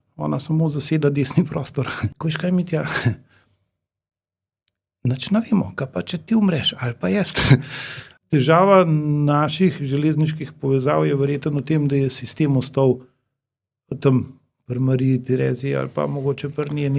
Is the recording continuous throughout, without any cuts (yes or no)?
no